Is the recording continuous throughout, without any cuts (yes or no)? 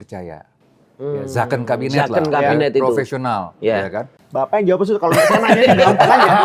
no